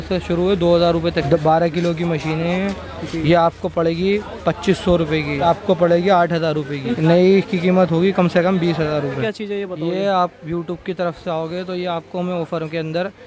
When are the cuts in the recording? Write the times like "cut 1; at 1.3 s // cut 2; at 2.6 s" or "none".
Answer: cut 1; at 1.2 s // cut 2; at 5.4 s // cut 3; at 6.9 s // cut 4; at 9.2 s